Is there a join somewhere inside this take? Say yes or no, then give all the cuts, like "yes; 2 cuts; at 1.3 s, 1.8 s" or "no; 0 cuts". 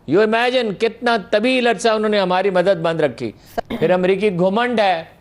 yes; 1 cut; at 3.5 s